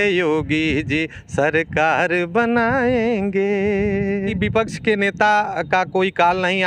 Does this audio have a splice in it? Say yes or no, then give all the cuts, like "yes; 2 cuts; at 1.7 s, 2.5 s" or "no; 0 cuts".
yes; 1 cut; at 4.3 s